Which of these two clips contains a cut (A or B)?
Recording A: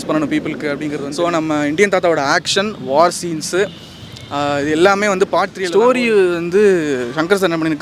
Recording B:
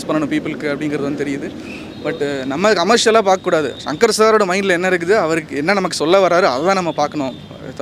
A